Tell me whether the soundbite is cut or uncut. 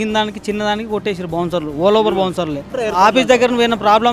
cut